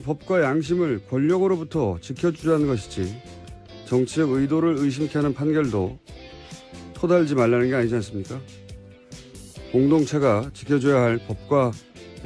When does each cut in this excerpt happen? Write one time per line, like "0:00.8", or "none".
0:06.0